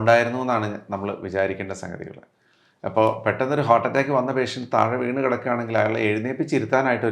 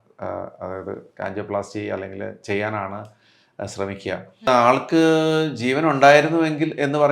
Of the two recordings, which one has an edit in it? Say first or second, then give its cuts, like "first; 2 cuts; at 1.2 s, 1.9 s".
second; 1 cut; at 4.5 s